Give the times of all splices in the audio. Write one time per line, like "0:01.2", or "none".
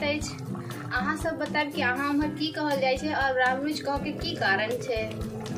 none